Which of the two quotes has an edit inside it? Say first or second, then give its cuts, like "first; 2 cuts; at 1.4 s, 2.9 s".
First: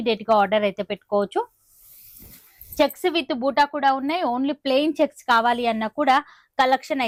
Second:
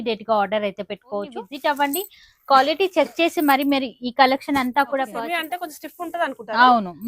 second; 2 cuts; at 1.4 s, 5.1 s